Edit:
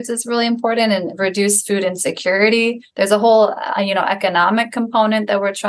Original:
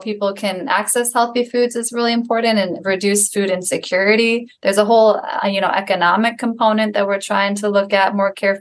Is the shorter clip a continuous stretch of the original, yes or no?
yes